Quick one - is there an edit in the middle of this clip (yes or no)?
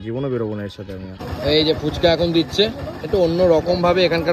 yes